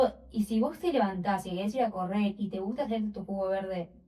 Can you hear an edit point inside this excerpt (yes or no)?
no